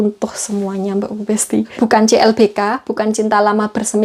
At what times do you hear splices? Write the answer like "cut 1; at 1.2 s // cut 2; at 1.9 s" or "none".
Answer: cut 1; at 1.7 s